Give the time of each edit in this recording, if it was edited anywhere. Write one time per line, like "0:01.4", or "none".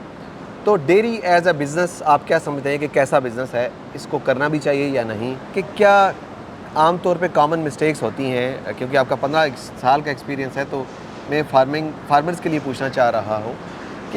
0:05.6

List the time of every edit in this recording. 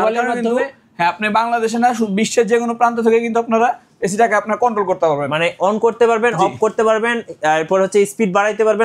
none

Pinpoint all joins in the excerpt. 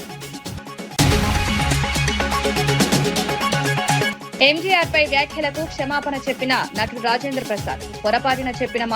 0:00.9
0:04.1

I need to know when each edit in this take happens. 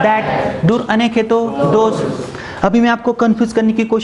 none

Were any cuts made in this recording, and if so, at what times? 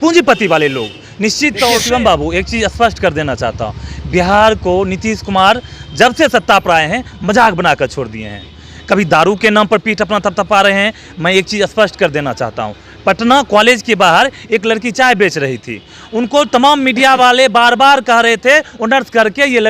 0:01.8
0:11.1

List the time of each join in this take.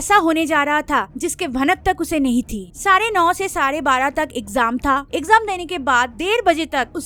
none

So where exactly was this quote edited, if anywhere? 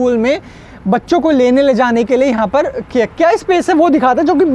none

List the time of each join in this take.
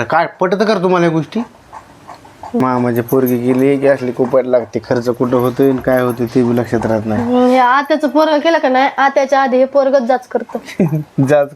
0:02.6

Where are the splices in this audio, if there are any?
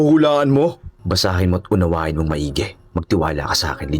0:00.9

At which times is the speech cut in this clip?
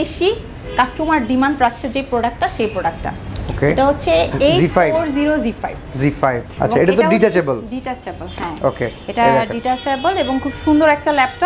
0:06.5

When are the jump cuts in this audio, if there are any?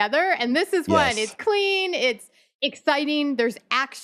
0:02.4

